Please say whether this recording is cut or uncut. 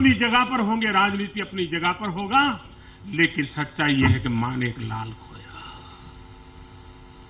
uncut